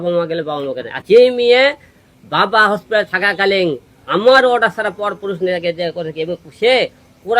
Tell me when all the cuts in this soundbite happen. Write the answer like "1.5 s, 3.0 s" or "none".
0.9 s